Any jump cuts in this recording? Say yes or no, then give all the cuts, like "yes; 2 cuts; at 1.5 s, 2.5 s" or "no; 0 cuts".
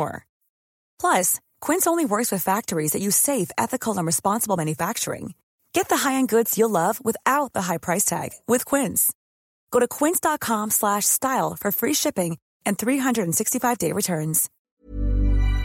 yes; 1 cut; at 14.5 s